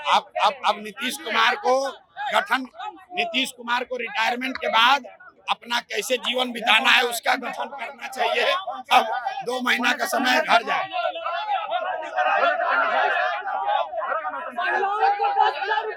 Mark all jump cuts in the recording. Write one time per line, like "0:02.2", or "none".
none